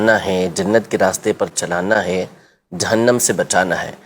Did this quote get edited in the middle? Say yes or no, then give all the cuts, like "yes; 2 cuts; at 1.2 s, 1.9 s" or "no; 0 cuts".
no; 0 cuts